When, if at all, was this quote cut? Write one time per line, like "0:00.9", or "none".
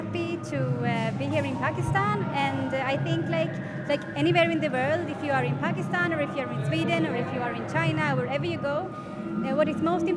none